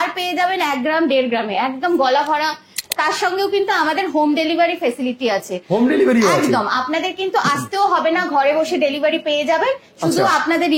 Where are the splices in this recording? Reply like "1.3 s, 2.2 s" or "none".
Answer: 2.7 s